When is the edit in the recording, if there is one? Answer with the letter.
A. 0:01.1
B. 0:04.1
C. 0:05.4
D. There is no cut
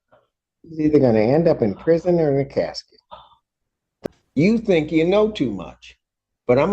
B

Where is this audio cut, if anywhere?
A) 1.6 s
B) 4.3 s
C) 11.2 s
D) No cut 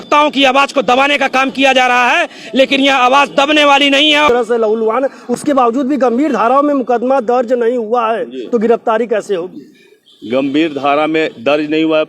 B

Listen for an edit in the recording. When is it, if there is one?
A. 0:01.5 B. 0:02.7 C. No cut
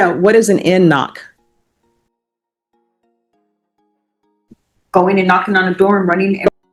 C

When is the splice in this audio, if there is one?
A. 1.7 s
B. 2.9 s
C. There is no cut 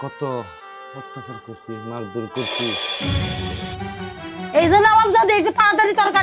B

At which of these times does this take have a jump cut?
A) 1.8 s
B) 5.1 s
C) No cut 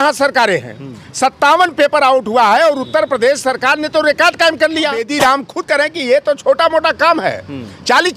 B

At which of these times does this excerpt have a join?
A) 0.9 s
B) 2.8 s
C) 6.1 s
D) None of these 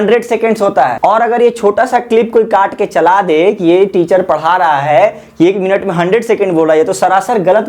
A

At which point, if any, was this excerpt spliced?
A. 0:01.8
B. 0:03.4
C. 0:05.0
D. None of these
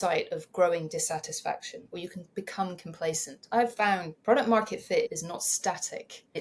D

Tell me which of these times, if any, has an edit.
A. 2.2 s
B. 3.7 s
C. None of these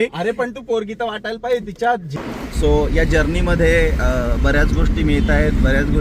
A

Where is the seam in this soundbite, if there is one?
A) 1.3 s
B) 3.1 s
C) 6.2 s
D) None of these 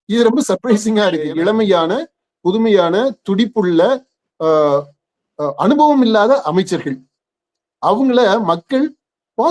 A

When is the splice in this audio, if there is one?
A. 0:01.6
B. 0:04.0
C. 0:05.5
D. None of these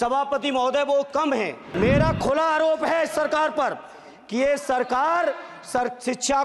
A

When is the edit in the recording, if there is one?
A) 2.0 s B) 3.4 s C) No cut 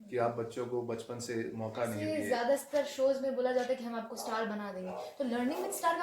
A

